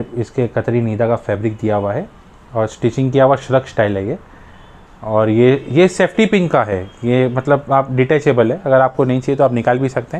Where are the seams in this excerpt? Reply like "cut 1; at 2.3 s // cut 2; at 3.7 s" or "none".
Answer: none